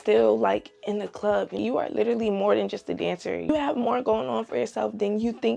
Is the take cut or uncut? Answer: cut